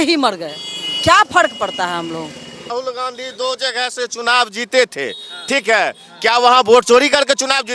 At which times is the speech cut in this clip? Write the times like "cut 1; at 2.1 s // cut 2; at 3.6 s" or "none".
cut 1; at 2.7 s